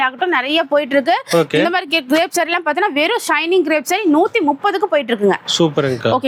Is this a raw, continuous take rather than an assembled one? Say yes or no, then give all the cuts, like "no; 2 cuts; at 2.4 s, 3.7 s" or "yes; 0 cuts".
yes; 0 cuts